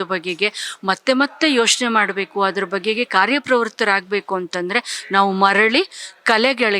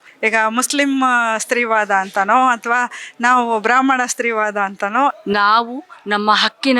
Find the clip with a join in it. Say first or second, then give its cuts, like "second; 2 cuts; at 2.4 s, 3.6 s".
second; 1 cut; at 5.1 s